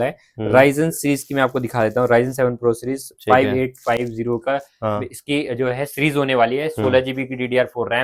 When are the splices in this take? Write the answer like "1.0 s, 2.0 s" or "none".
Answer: none